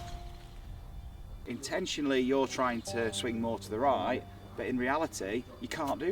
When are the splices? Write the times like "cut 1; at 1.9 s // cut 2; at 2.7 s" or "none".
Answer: cut 1; at 1.4 s // cut 2; at 3.2 s